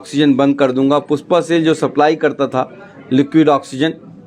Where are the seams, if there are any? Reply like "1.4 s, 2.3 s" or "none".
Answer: none